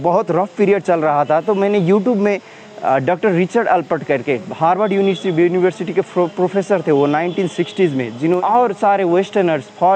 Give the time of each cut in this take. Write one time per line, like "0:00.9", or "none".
0:08.4